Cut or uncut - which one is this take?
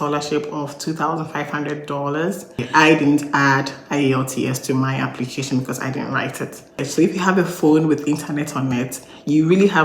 cut